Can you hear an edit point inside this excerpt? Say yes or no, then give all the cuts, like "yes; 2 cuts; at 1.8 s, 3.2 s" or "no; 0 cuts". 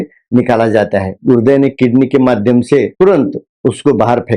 yes; 1 cut; at 1.1 s